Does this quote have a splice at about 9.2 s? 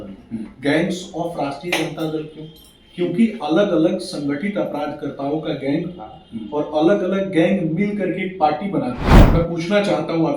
yes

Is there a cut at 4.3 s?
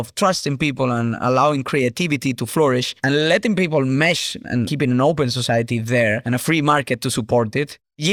no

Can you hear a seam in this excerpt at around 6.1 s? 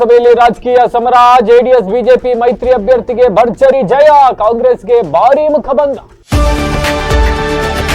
yes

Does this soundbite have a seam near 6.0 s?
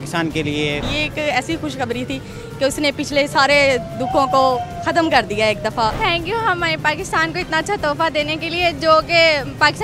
yes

